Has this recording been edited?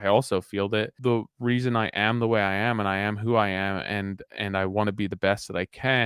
yes; 1 cut; at 0.9 s

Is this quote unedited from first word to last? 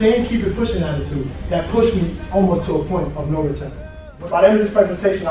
no; 1 cut; at 3.9 s

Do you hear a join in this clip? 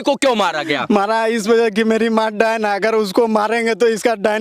no; 0 cuts

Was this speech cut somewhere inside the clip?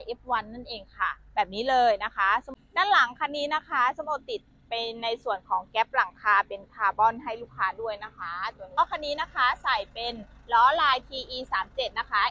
yes; 2 cuts; at 2.5 s, 8.8 s

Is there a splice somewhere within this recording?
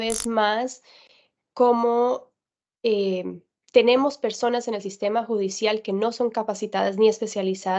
no; 0 cuts

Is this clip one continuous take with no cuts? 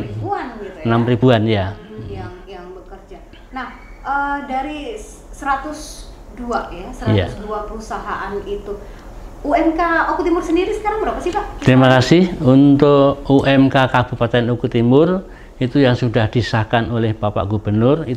yes; 0 cuts

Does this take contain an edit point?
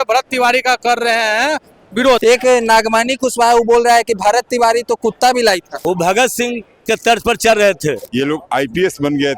yes; 3 cuts; at 2.2 s, 5.7 s, 8.0 s

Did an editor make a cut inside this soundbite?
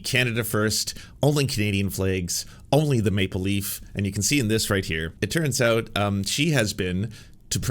yes; 1 cut; at 5.2 s

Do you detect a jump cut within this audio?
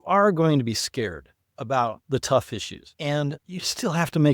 yes; 2 cuts; at 2.8 s, 3.4 s

